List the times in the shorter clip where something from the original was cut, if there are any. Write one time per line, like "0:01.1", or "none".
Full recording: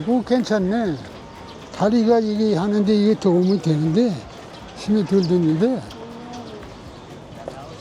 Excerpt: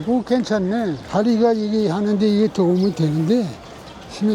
0:01.0